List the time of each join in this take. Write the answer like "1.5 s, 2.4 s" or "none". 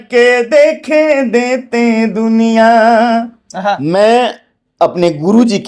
3.8 s